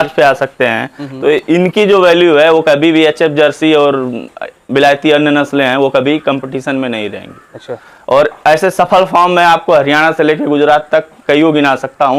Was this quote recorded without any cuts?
yes; 0 cuts

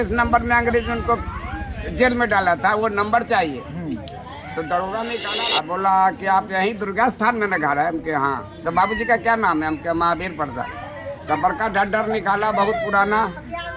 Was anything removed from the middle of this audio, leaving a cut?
yes; 1 cut; at 5.2 s

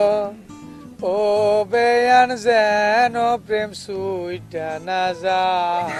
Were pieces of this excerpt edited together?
no; 0 cuts

